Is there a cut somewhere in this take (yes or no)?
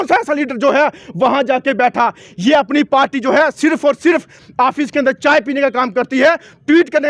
no